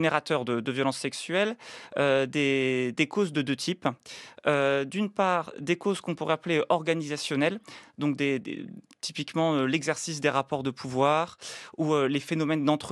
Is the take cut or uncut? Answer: uncut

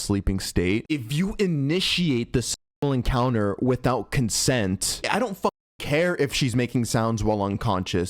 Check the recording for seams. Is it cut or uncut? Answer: uncut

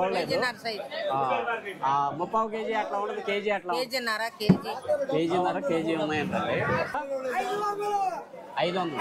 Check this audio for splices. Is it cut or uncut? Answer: cut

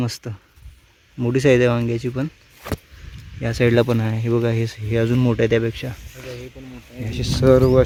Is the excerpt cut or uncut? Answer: uncut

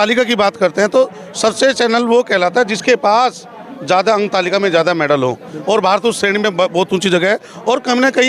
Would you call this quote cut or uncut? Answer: uncut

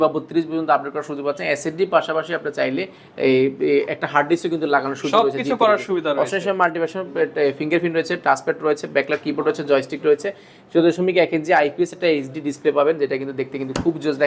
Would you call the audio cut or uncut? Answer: uncut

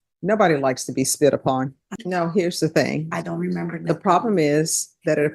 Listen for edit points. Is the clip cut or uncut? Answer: cut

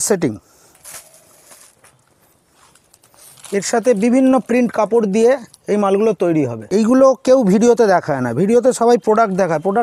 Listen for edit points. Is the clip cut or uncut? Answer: cut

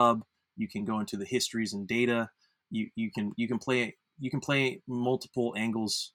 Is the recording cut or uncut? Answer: uncut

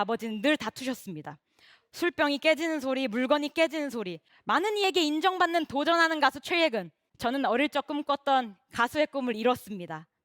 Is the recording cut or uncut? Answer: cut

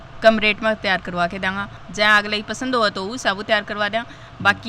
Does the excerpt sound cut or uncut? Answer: cut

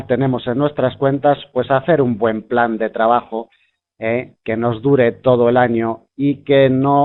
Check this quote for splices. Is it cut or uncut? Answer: cut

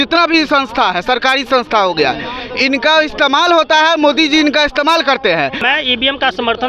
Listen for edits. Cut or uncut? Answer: cut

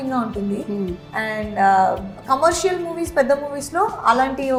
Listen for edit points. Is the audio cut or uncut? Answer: uncut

